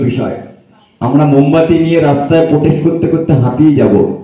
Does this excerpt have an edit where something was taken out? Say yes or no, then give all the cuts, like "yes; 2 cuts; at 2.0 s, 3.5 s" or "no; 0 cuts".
yes; 1 cut; at 1.1 s